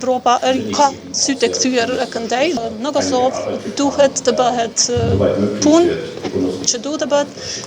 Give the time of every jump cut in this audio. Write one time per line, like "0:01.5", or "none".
0:02.6